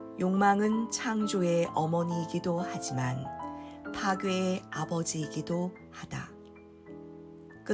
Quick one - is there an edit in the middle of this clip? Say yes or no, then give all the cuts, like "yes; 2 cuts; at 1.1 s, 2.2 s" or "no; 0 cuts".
no; 0 cuts